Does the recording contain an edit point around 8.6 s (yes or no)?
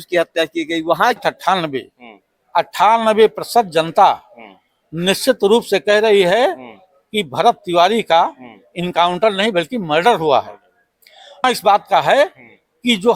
no